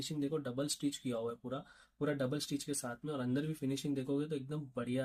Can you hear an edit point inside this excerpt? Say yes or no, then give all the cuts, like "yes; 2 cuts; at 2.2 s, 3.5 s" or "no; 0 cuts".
no; 0 cuts